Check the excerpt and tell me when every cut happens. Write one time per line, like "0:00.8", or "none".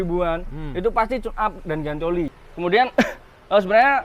0:02.4